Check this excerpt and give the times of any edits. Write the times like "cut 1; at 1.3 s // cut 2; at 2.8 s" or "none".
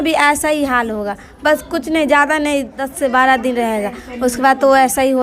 cut 1; at 2.8 s